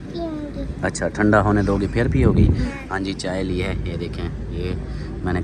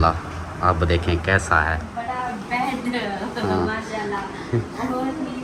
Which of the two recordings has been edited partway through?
second; 1 cut; at 1.9 s

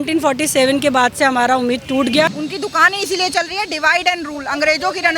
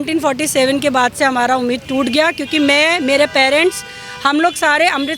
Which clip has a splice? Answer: first; 1 cut; at 2.3 s

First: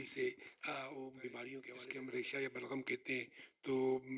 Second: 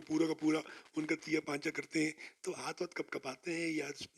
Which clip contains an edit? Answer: first; 1 cut; at 1.8 s

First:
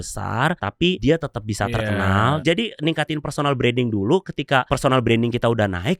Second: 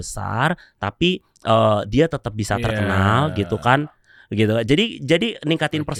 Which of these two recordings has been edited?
first; 3 cuts; at 0.9 s, 2.4 s, 4.7 s

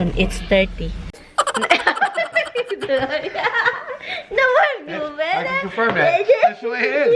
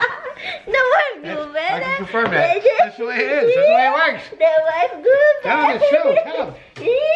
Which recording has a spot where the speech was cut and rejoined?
first; 1 cut; at 1.2 s

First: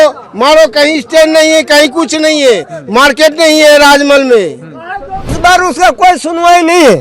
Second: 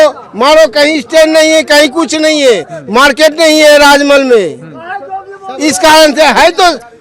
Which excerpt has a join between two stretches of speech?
first; 1 cut; at 5.3 s

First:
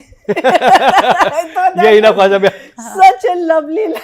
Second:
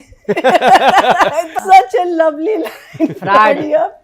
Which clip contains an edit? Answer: second; 1 cut; at 1.5 s

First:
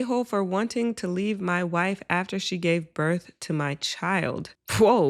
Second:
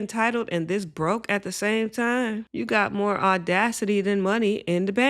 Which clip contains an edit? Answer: second; 1 cut; at 2.5 s

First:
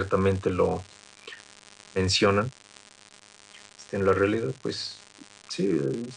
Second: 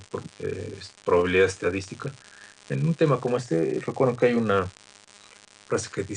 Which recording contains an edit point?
first; 1 cut; at 1.8 s

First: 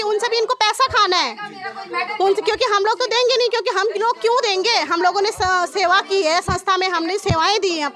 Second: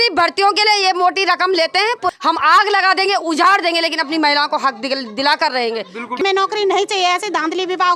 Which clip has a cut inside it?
second; 2 cuts; at 2.1 s, 6.2 s

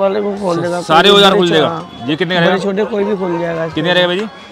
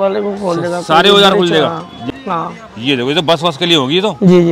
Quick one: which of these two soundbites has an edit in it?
second; 1 cut; at 2.0 s

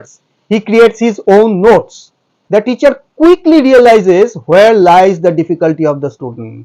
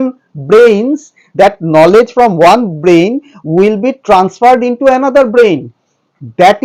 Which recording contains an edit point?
first; 1 cut; at 2.3 s

